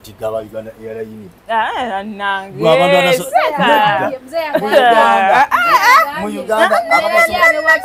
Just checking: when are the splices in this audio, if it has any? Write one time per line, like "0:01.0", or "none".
none